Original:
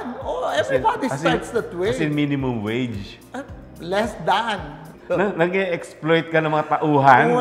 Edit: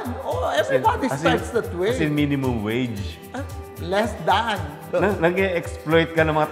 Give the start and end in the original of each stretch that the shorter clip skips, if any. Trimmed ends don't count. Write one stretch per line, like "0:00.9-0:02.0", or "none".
0:04.7-0:04.9

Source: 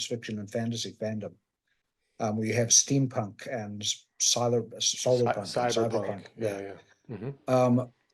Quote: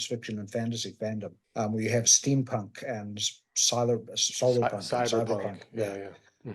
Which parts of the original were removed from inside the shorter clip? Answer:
0:01.4-0:02.0

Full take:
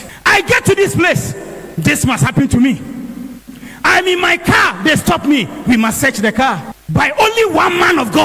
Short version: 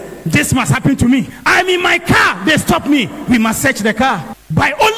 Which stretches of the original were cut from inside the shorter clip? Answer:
0:02.9-0:03.7

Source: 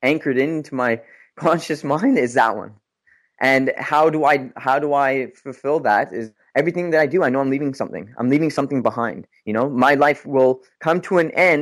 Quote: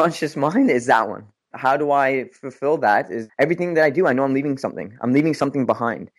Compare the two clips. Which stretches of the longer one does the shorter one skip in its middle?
0:03.0-0:04.5
0:06.2-0:06.4

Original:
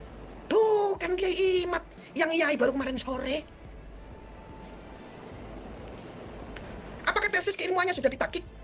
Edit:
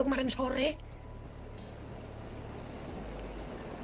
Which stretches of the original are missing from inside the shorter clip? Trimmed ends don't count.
none

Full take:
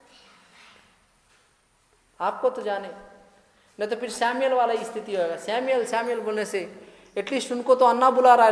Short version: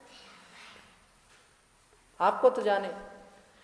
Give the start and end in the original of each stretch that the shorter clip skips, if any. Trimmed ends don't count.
none

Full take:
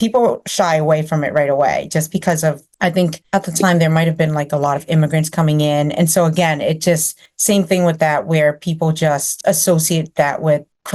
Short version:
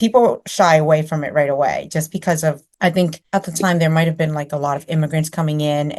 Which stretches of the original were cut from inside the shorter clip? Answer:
none

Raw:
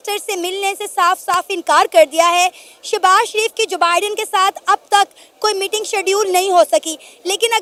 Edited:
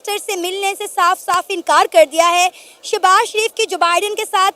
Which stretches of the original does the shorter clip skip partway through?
none

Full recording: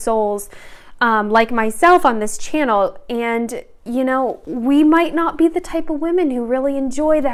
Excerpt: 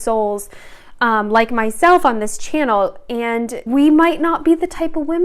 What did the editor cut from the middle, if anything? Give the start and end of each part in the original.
0:03.6-0:04.5

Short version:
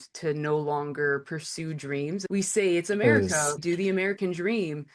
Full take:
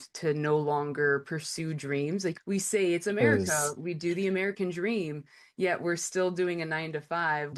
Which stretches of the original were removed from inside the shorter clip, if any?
0:02.2-0:02.4
0:03.8-0:04.0

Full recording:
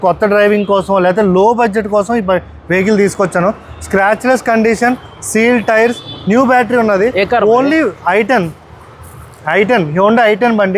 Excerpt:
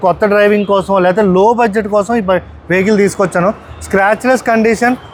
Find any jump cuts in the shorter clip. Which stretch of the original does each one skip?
none

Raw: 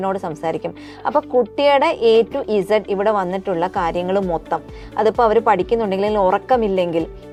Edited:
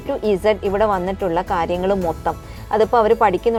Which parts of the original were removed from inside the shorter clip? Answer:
none

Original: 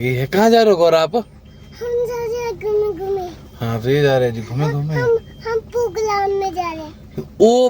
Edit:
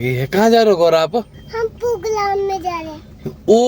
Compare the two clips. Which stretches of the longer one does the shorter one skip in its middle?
0:01.4-0:05.3

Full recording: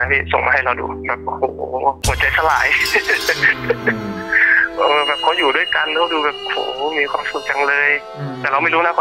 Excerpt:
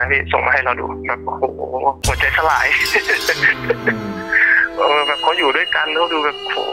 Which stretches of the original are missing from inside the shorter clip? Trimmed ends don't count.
none

